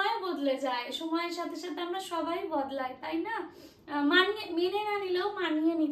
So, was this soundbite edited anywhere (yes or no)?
no